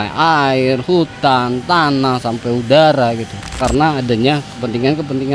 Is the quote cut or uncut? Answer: cut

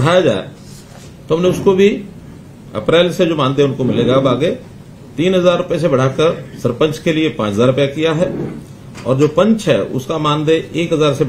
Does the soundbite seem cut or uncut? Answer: uncut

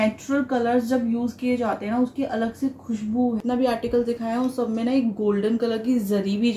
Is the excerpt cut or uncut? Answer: cut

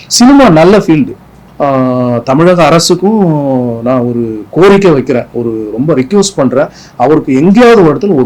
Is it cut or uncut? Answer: cut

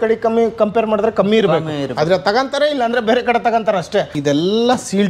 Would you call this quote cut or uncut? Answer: cut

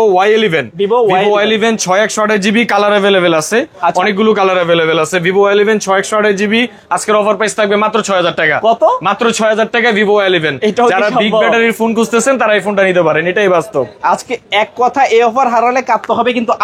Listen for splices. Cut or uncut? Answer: uncut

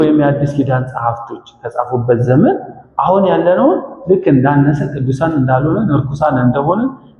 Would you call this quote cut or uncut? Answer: uncut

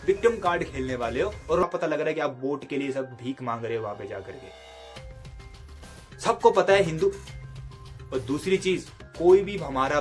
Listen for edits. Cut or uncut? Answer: cut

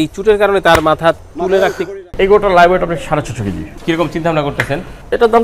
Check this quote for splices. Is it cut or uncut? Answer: cut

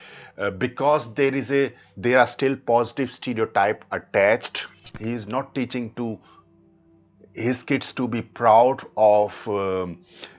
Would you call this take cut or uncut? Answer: cut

